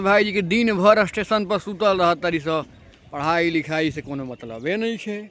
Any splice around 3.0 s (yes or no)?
no